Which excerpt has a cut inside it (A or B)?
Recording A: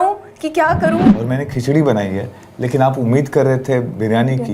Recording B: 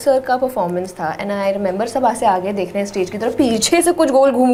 A